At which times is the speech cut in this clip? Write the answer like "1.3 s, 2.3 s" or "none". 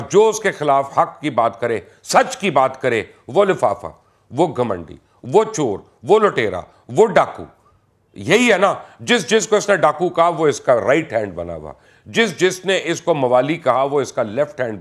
none